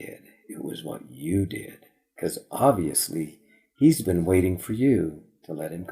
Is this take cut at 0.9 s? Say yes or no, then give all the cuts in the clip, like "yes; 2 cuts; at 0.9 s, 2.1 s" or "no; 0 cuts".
no; 0 cuts